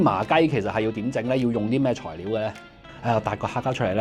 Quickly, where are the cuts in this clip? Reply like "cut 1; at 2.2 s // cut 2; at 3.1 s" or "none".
cut 1; at 2.8 s